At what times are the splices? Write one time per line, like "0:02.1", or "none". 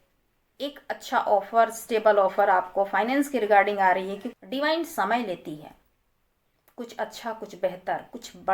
0:04.3